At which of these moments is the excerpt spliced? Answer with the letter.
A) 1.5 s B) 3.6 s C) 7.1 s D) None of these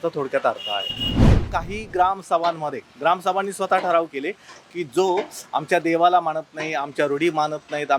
A